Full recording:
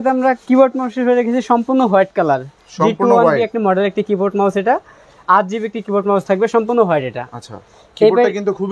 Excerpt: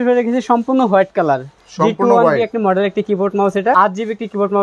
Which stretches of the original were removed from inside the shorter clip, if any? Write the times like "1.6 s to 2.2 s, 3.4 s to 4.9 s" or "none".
4.7 s to 5.3 s